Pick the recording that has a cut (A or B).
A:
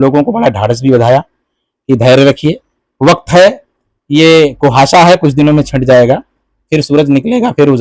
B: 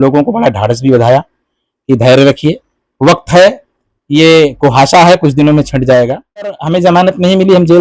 B